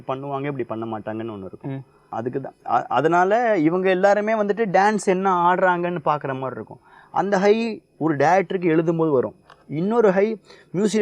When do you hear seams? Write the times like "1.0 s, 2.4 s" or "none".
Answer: 2.0 s